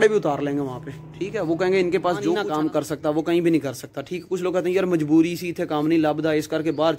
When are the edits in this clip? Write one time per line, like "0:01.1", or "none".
0:02.4